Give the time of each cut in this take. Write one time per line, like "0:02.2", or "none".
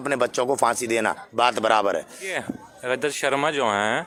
none